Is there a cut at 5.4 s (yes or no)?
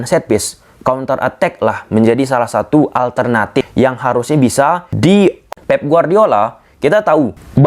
yes